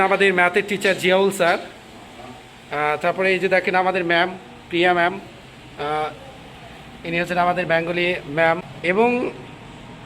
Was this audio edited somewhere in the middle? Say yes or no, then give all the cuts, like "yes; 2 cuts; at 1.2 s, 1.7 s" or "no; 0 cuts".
yes; 1 cut; at 8.7 s